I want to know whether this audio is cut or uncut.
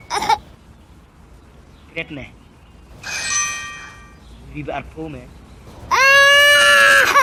uncut